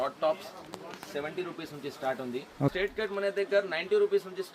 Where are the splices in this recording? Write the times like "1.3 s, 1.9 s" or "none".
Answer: 2.7 s